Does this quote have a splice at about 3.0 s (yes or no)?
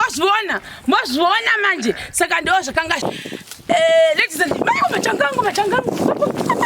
yes